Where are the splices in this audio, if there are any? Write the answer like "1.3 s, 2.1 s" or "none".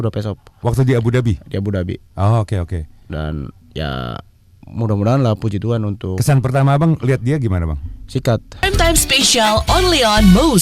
8.6 s